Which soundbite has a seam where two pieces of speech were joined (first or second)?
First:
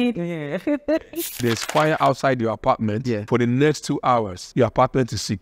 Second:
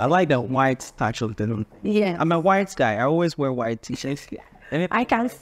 first